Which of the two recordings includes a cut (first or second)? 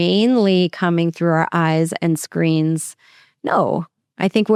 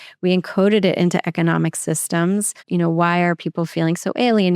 second